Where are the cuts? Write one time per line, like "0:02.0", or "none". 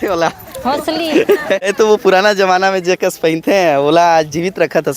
0:01.7